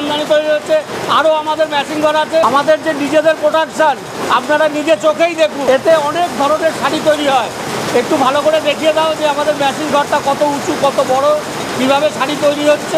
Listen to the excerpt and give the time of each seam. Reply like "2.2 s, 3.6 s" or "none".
2.4 s, 5.6 s